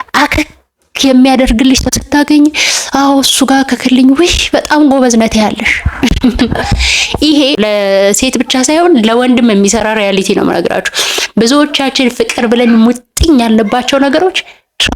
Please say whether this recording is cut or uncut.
uncut